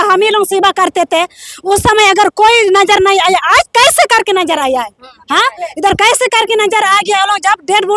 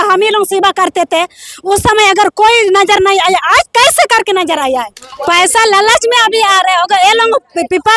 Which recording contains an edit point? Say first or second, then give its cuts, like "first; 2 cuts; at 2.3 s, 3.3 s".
second; 1 cut; at 5.0 s